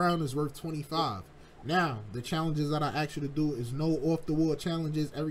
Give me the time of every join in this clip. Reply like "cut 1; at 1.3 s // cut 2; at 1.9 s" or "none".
none